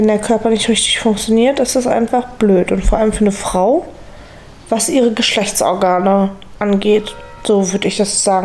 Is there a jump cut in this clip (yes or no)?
no